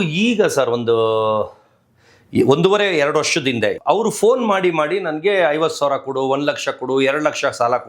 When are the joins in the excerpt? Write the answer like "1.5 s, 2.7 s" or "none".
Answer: 3.8 s